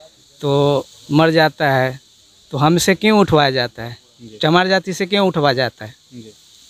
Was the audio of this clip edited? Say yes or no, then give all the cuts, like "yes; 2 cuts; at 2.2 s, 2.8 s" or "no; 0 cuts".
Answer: no; 0 cuts